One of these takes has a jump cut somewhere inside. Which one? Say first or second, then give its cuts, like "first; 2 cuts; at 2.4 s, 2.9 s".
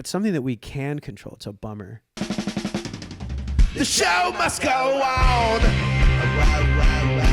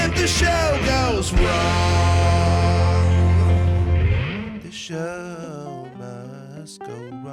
first; 1 cut; at 2.2 s